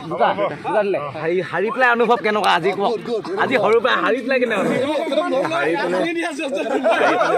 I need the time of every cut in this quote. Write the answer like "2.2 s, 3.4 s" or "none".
1.1 s